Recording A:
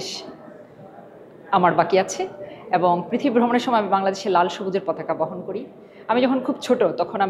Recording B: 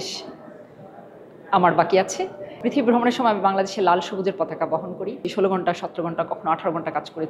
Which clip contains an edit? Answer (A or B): B